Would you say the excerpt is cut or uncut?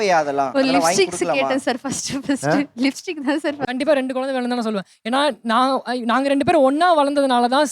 cut